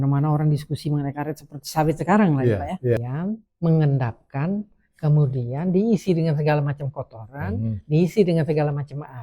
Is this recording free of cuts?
no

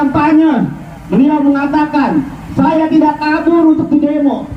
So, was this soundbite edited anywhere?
no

